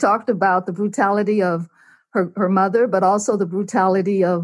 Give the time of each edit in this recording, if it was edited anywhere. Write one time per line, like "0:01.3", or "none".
none